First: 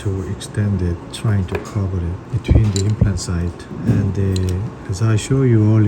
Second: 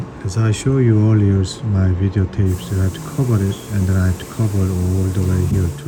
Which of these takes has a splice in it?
first; 3 cuts; at 1.1 s, 2.2 s, 3.6 s

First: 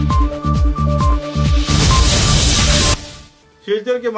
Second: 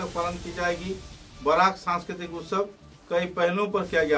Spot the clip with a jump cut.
first; 1 cut; at 2.9 s

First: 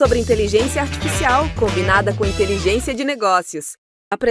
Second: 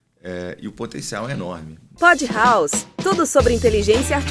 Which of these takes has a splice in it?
second; 1 cut; at 1.9 s

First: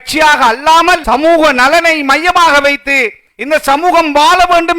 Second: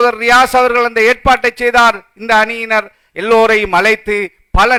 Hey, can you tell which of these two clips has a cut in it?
first; 1 cut; at 1.0 s

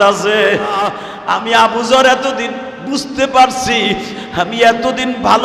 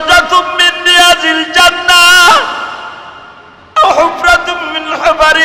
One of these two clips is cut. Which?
first; 1 cut; at 1.1 s

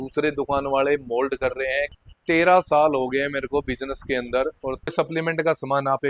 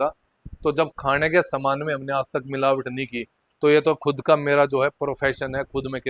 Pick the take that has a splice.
first; 2 cuts; at 1.9 s, 4.9 s

